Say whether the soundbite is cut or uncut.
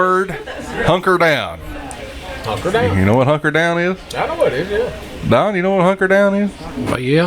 uncut